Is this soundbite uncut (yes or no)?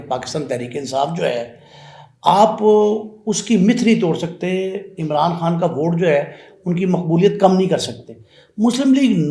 yes